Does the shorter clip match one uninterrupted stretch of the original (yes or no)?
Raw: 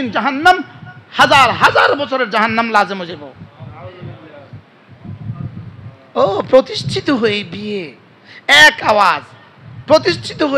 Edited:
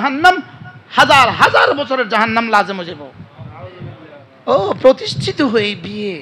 no